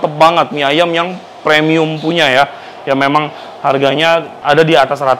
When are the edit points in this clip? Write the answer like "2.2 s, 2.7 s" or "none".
none